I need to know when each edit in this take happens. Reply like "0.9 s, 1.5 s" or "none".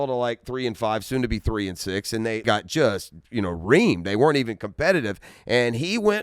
2.4 s